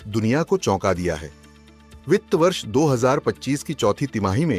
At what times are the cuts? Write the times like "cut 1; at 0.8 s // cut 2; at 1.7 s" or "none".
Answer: none